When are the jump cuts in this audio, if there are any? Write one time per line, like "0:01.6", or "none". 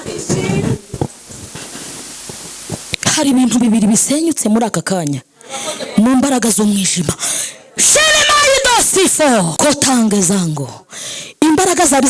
0:09.5